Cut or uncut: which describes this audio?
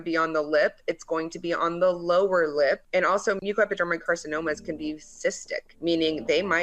cut